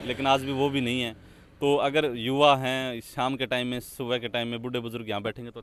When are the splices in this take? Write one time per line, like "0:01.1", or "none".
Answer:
none